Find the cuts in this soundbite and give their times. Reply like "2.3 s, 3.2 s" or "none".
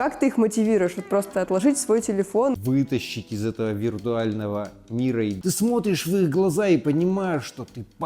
2.5 s, 5.4 s